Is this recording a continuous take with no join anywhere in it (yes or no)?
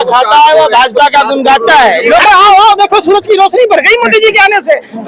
no